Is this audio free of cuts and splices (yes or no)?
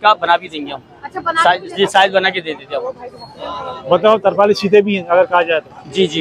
yes